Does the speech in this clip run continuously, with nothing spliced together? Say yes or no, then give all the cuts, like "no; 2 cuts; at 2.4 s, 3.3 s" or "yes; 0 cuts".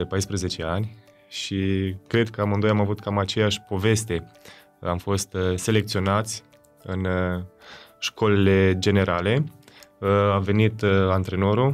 yes; 0 cuts